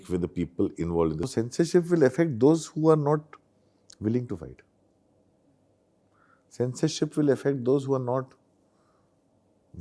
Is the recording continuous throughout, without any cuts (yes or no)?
no